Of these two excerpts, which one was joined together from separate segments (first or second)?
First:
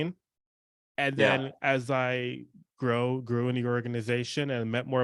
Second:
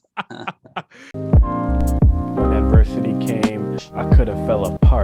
second